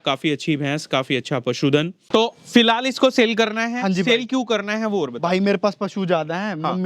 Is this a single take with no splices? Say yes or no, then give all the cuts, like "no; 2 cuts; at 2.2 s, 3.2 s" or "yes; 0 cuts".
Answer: no; 1 cut; at 2.0 s